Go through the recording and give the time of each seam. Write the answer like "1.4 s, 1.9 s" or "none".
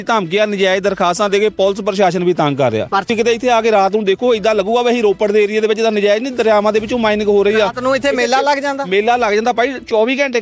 3.1 s